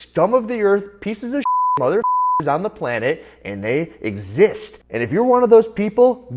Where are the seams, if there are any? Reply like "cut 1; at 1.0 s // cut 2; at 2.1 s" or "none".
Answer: cut 1; at 4.9 s